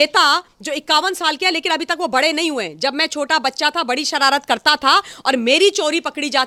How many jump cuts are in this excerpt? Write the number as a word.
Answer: zero